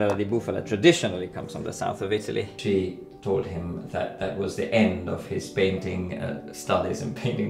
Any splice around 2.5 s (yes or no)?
yes